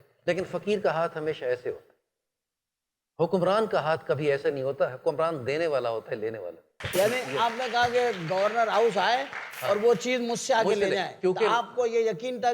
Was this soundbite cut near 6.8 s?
yes; 1 cut; at 6.8 s

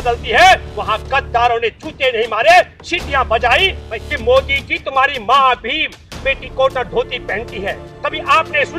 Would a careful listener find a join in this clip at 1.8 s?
no; 2 cuts; at 3.9 s, 7.9 s

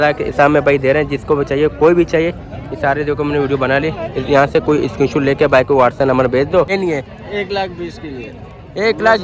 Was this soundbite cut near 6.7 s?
yes; 1 cut; at 6.7 s

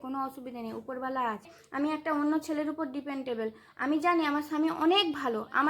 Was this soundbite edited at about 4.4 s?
no; 1 cut; at 1.6 s

